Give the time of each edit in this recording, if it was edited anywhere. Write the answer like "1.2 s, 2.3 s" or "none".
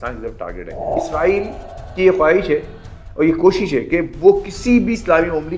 1.0 s